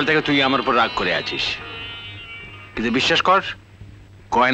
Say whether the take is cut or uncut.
uncut